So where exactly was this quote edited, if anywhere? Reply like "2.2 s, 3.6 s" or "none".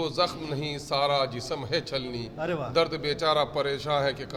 none

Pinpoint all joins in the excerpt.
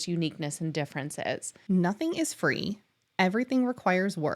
1.5 s

